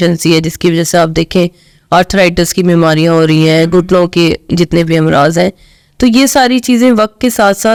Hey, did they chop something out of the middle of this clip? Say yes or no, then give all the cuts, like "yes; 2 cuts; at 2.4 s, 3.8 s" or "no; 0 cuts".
no; 0 cuts